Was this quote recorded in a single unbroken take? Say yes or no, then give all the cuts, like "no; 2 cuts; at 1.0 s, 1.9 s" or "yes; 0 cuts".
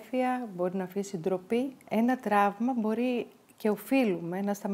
no; 1 cut; at 1.8 s